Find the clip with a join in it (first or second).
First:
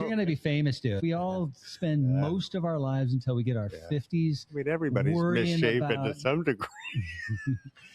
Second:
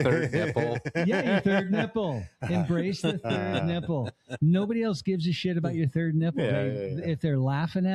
first